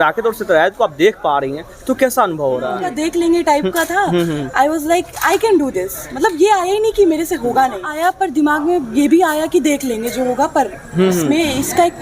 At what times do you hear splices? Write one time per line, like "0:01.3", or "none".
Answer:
0:02.8
0:07.9